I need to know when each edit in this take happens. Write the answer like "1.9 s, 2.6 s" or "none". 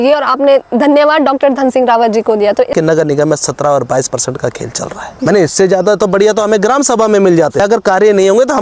2.7 s, 5.1 s, 7.6 s